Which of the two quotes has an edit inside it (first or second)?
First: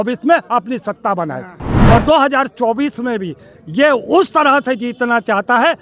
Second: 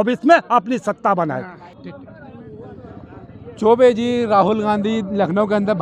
first